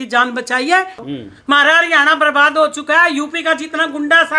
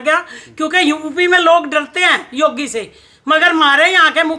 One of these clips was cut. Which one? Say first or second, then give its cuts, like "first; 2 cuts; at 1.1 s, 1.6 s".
first; 1 cut; at 1.0 s